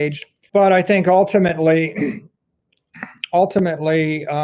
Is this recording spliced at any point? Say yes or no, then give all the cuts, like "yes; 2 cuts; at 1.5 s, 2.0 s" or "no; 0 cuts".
no; 0 cuts